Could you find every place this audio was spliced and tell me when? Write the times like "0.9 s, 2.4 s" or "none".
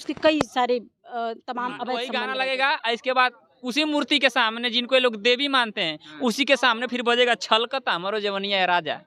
2.2 s